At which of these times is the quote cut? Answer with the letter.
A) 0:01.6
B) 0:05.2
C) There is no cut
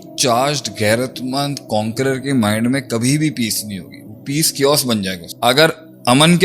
B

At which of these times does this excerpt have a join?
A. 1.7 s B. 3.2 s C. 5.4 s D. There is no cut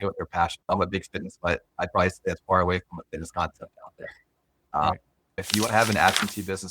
C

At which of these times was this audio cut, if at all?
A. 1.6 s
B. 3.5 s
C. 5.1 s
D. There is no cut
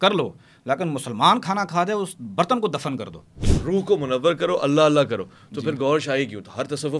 B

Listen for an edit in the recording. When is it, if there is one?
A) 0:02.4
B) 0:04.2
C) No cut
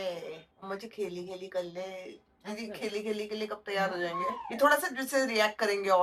C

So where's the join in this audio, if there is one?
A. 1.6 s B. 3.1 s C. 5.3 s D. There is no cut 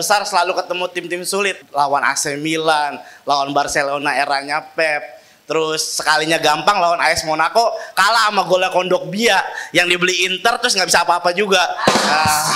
A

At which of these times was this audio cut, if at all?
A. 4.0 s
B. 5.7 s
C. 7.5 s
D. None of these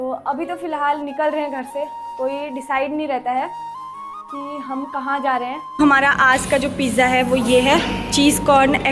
B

